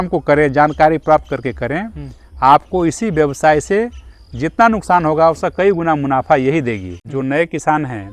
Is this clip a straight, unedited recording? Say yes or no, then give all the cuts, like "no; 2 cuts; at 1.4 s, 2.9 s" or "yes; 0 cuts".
no; 1 cut; at 7.0 s